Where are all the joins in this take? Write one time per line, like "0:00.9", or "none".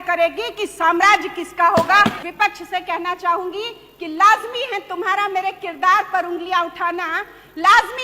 0:02.2